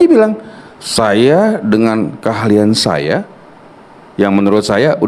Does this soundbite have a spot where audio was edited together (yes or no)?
no